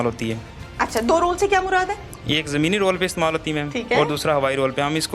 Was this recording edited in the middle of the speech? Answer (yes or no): no